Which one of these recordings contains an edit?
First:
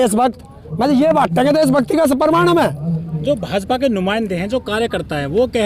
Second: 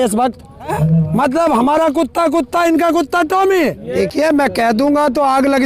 second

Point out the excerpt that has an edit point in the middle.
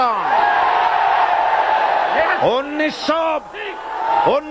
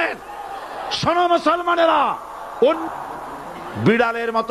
second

